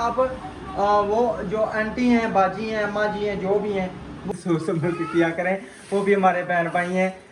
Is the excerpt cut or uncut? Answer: cut